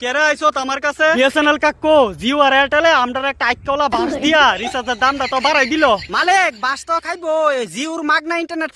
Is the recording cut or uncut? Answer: uncut